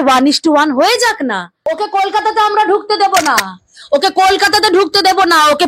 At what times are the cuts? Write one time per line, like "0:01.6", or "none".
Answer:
0:01.6

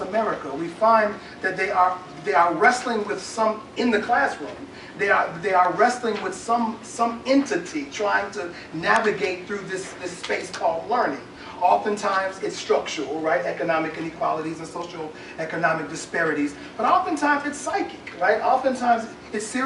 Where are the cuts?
none

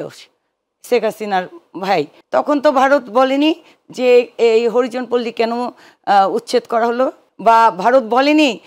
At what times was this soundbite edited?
0:02.2
0:07.2

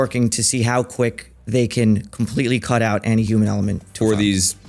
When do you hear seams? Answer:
none

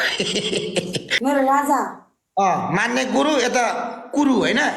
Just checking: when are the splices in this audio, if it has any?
0:01.0

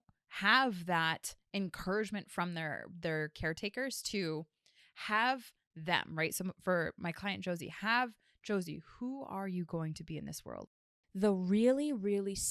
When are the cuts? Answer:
0:10.5

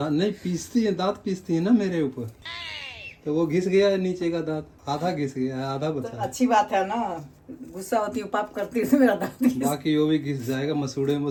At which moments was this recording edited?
none

